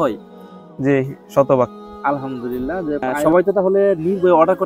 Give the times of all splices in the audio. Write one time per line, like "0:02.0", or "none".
0:03.1